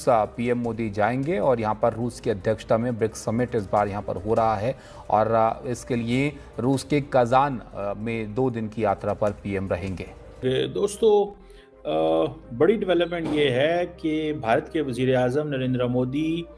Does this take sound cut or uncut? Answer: uncut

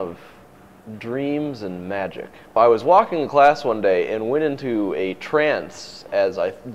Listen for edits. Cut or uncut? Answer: cut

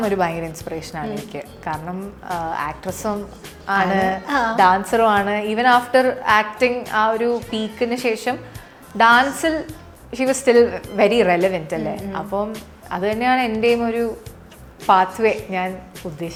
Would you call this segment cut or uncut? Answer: uncut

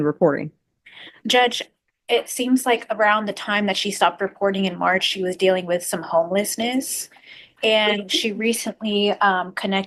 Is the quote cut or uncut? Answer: uncut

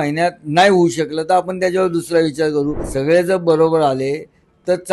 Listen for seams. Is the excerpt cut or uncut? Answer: cut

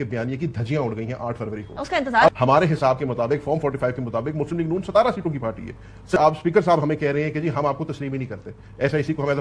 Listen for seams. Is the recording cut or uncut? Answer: cut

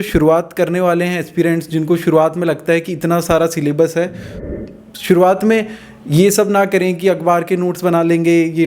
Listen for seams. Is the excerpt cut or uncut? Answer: cut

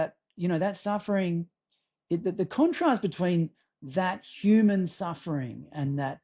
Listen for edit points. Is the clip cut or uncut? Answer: uncut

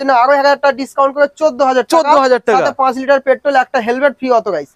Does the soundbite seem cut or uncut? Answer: uncut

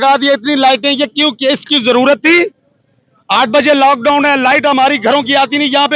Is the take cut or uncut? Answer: uncut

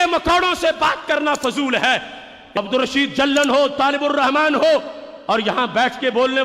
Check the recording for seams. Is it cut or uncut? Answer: cut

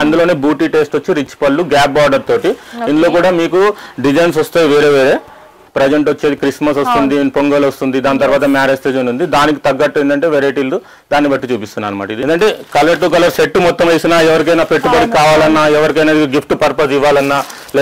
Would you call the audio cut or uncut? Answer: cut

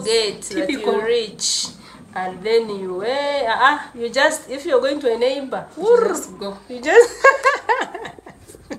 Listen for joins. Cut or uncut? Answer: uncut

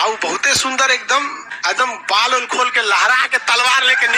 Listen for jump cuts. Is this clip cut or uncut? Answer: uncut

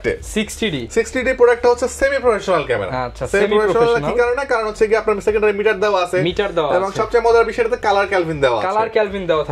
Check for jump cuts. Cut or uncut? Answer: uncut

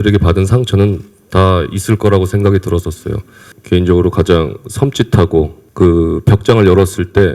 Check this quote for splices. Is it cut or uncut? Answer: cut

